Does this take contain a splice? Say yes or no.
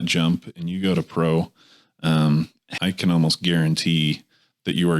yes